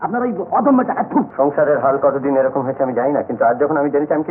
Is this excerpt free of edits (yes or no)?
no